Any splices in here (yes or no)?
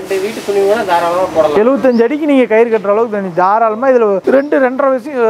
yes